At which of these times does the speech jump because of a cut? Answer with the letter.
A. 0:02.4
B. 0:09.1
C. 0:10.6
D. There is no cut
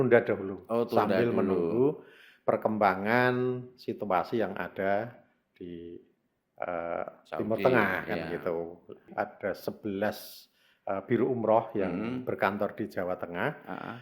B